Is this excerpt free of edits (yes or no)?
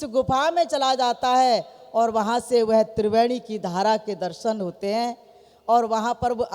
yes